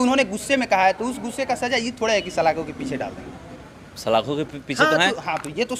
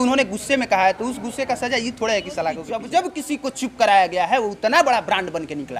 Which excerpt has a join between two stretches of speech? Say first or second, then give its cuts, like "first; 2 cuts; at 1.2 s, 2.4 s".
second; 1 cut; at 2.6 s